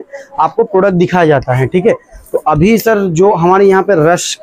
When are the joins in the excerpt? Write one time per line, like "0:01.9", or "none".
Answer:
none